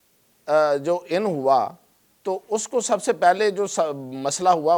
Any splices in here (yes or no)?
no